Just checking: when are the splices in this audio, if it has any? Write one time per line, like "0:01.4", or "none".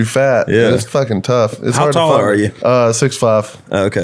0:02.5

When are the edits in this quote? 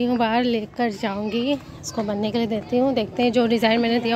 none

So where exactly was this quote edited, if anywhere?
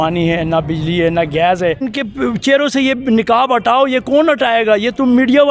0:02.0

